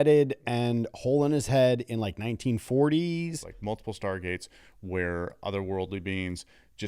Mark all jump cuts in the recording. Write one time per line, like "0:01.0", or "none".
0:03.5